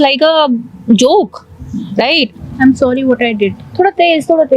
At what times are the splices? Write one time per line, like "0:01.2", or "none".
0:02.3